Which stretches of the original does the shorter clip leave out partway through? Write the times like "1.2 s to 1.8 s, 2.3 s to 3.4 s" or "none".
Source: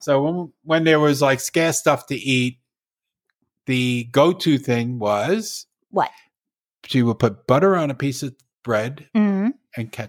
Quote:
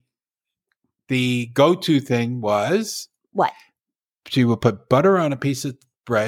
none